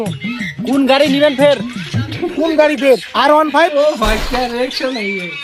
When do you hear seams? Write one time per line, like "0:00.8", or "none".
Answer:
0:03.6